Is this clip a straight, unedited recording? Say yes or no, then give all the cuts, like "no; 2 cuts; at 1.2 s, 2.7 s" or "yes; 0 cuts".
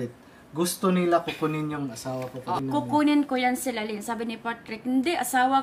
no; 1 cut; at 2.6 s